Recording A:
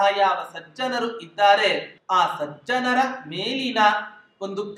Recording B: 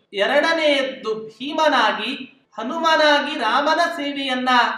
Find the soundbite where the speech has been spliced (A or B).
A